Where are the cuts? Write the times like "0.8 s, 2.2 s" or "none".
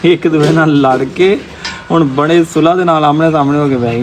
none